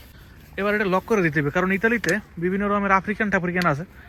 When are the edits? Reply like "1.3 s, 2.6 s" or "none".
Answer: none